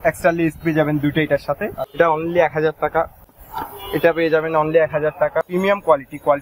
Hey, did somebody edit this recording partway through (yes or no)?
yes